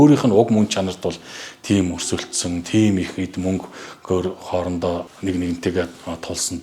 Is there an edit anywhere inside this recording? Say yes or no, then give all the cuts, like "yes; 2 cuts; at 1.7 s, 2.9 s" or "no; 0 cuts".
yes; 1 cut; at 5.1 s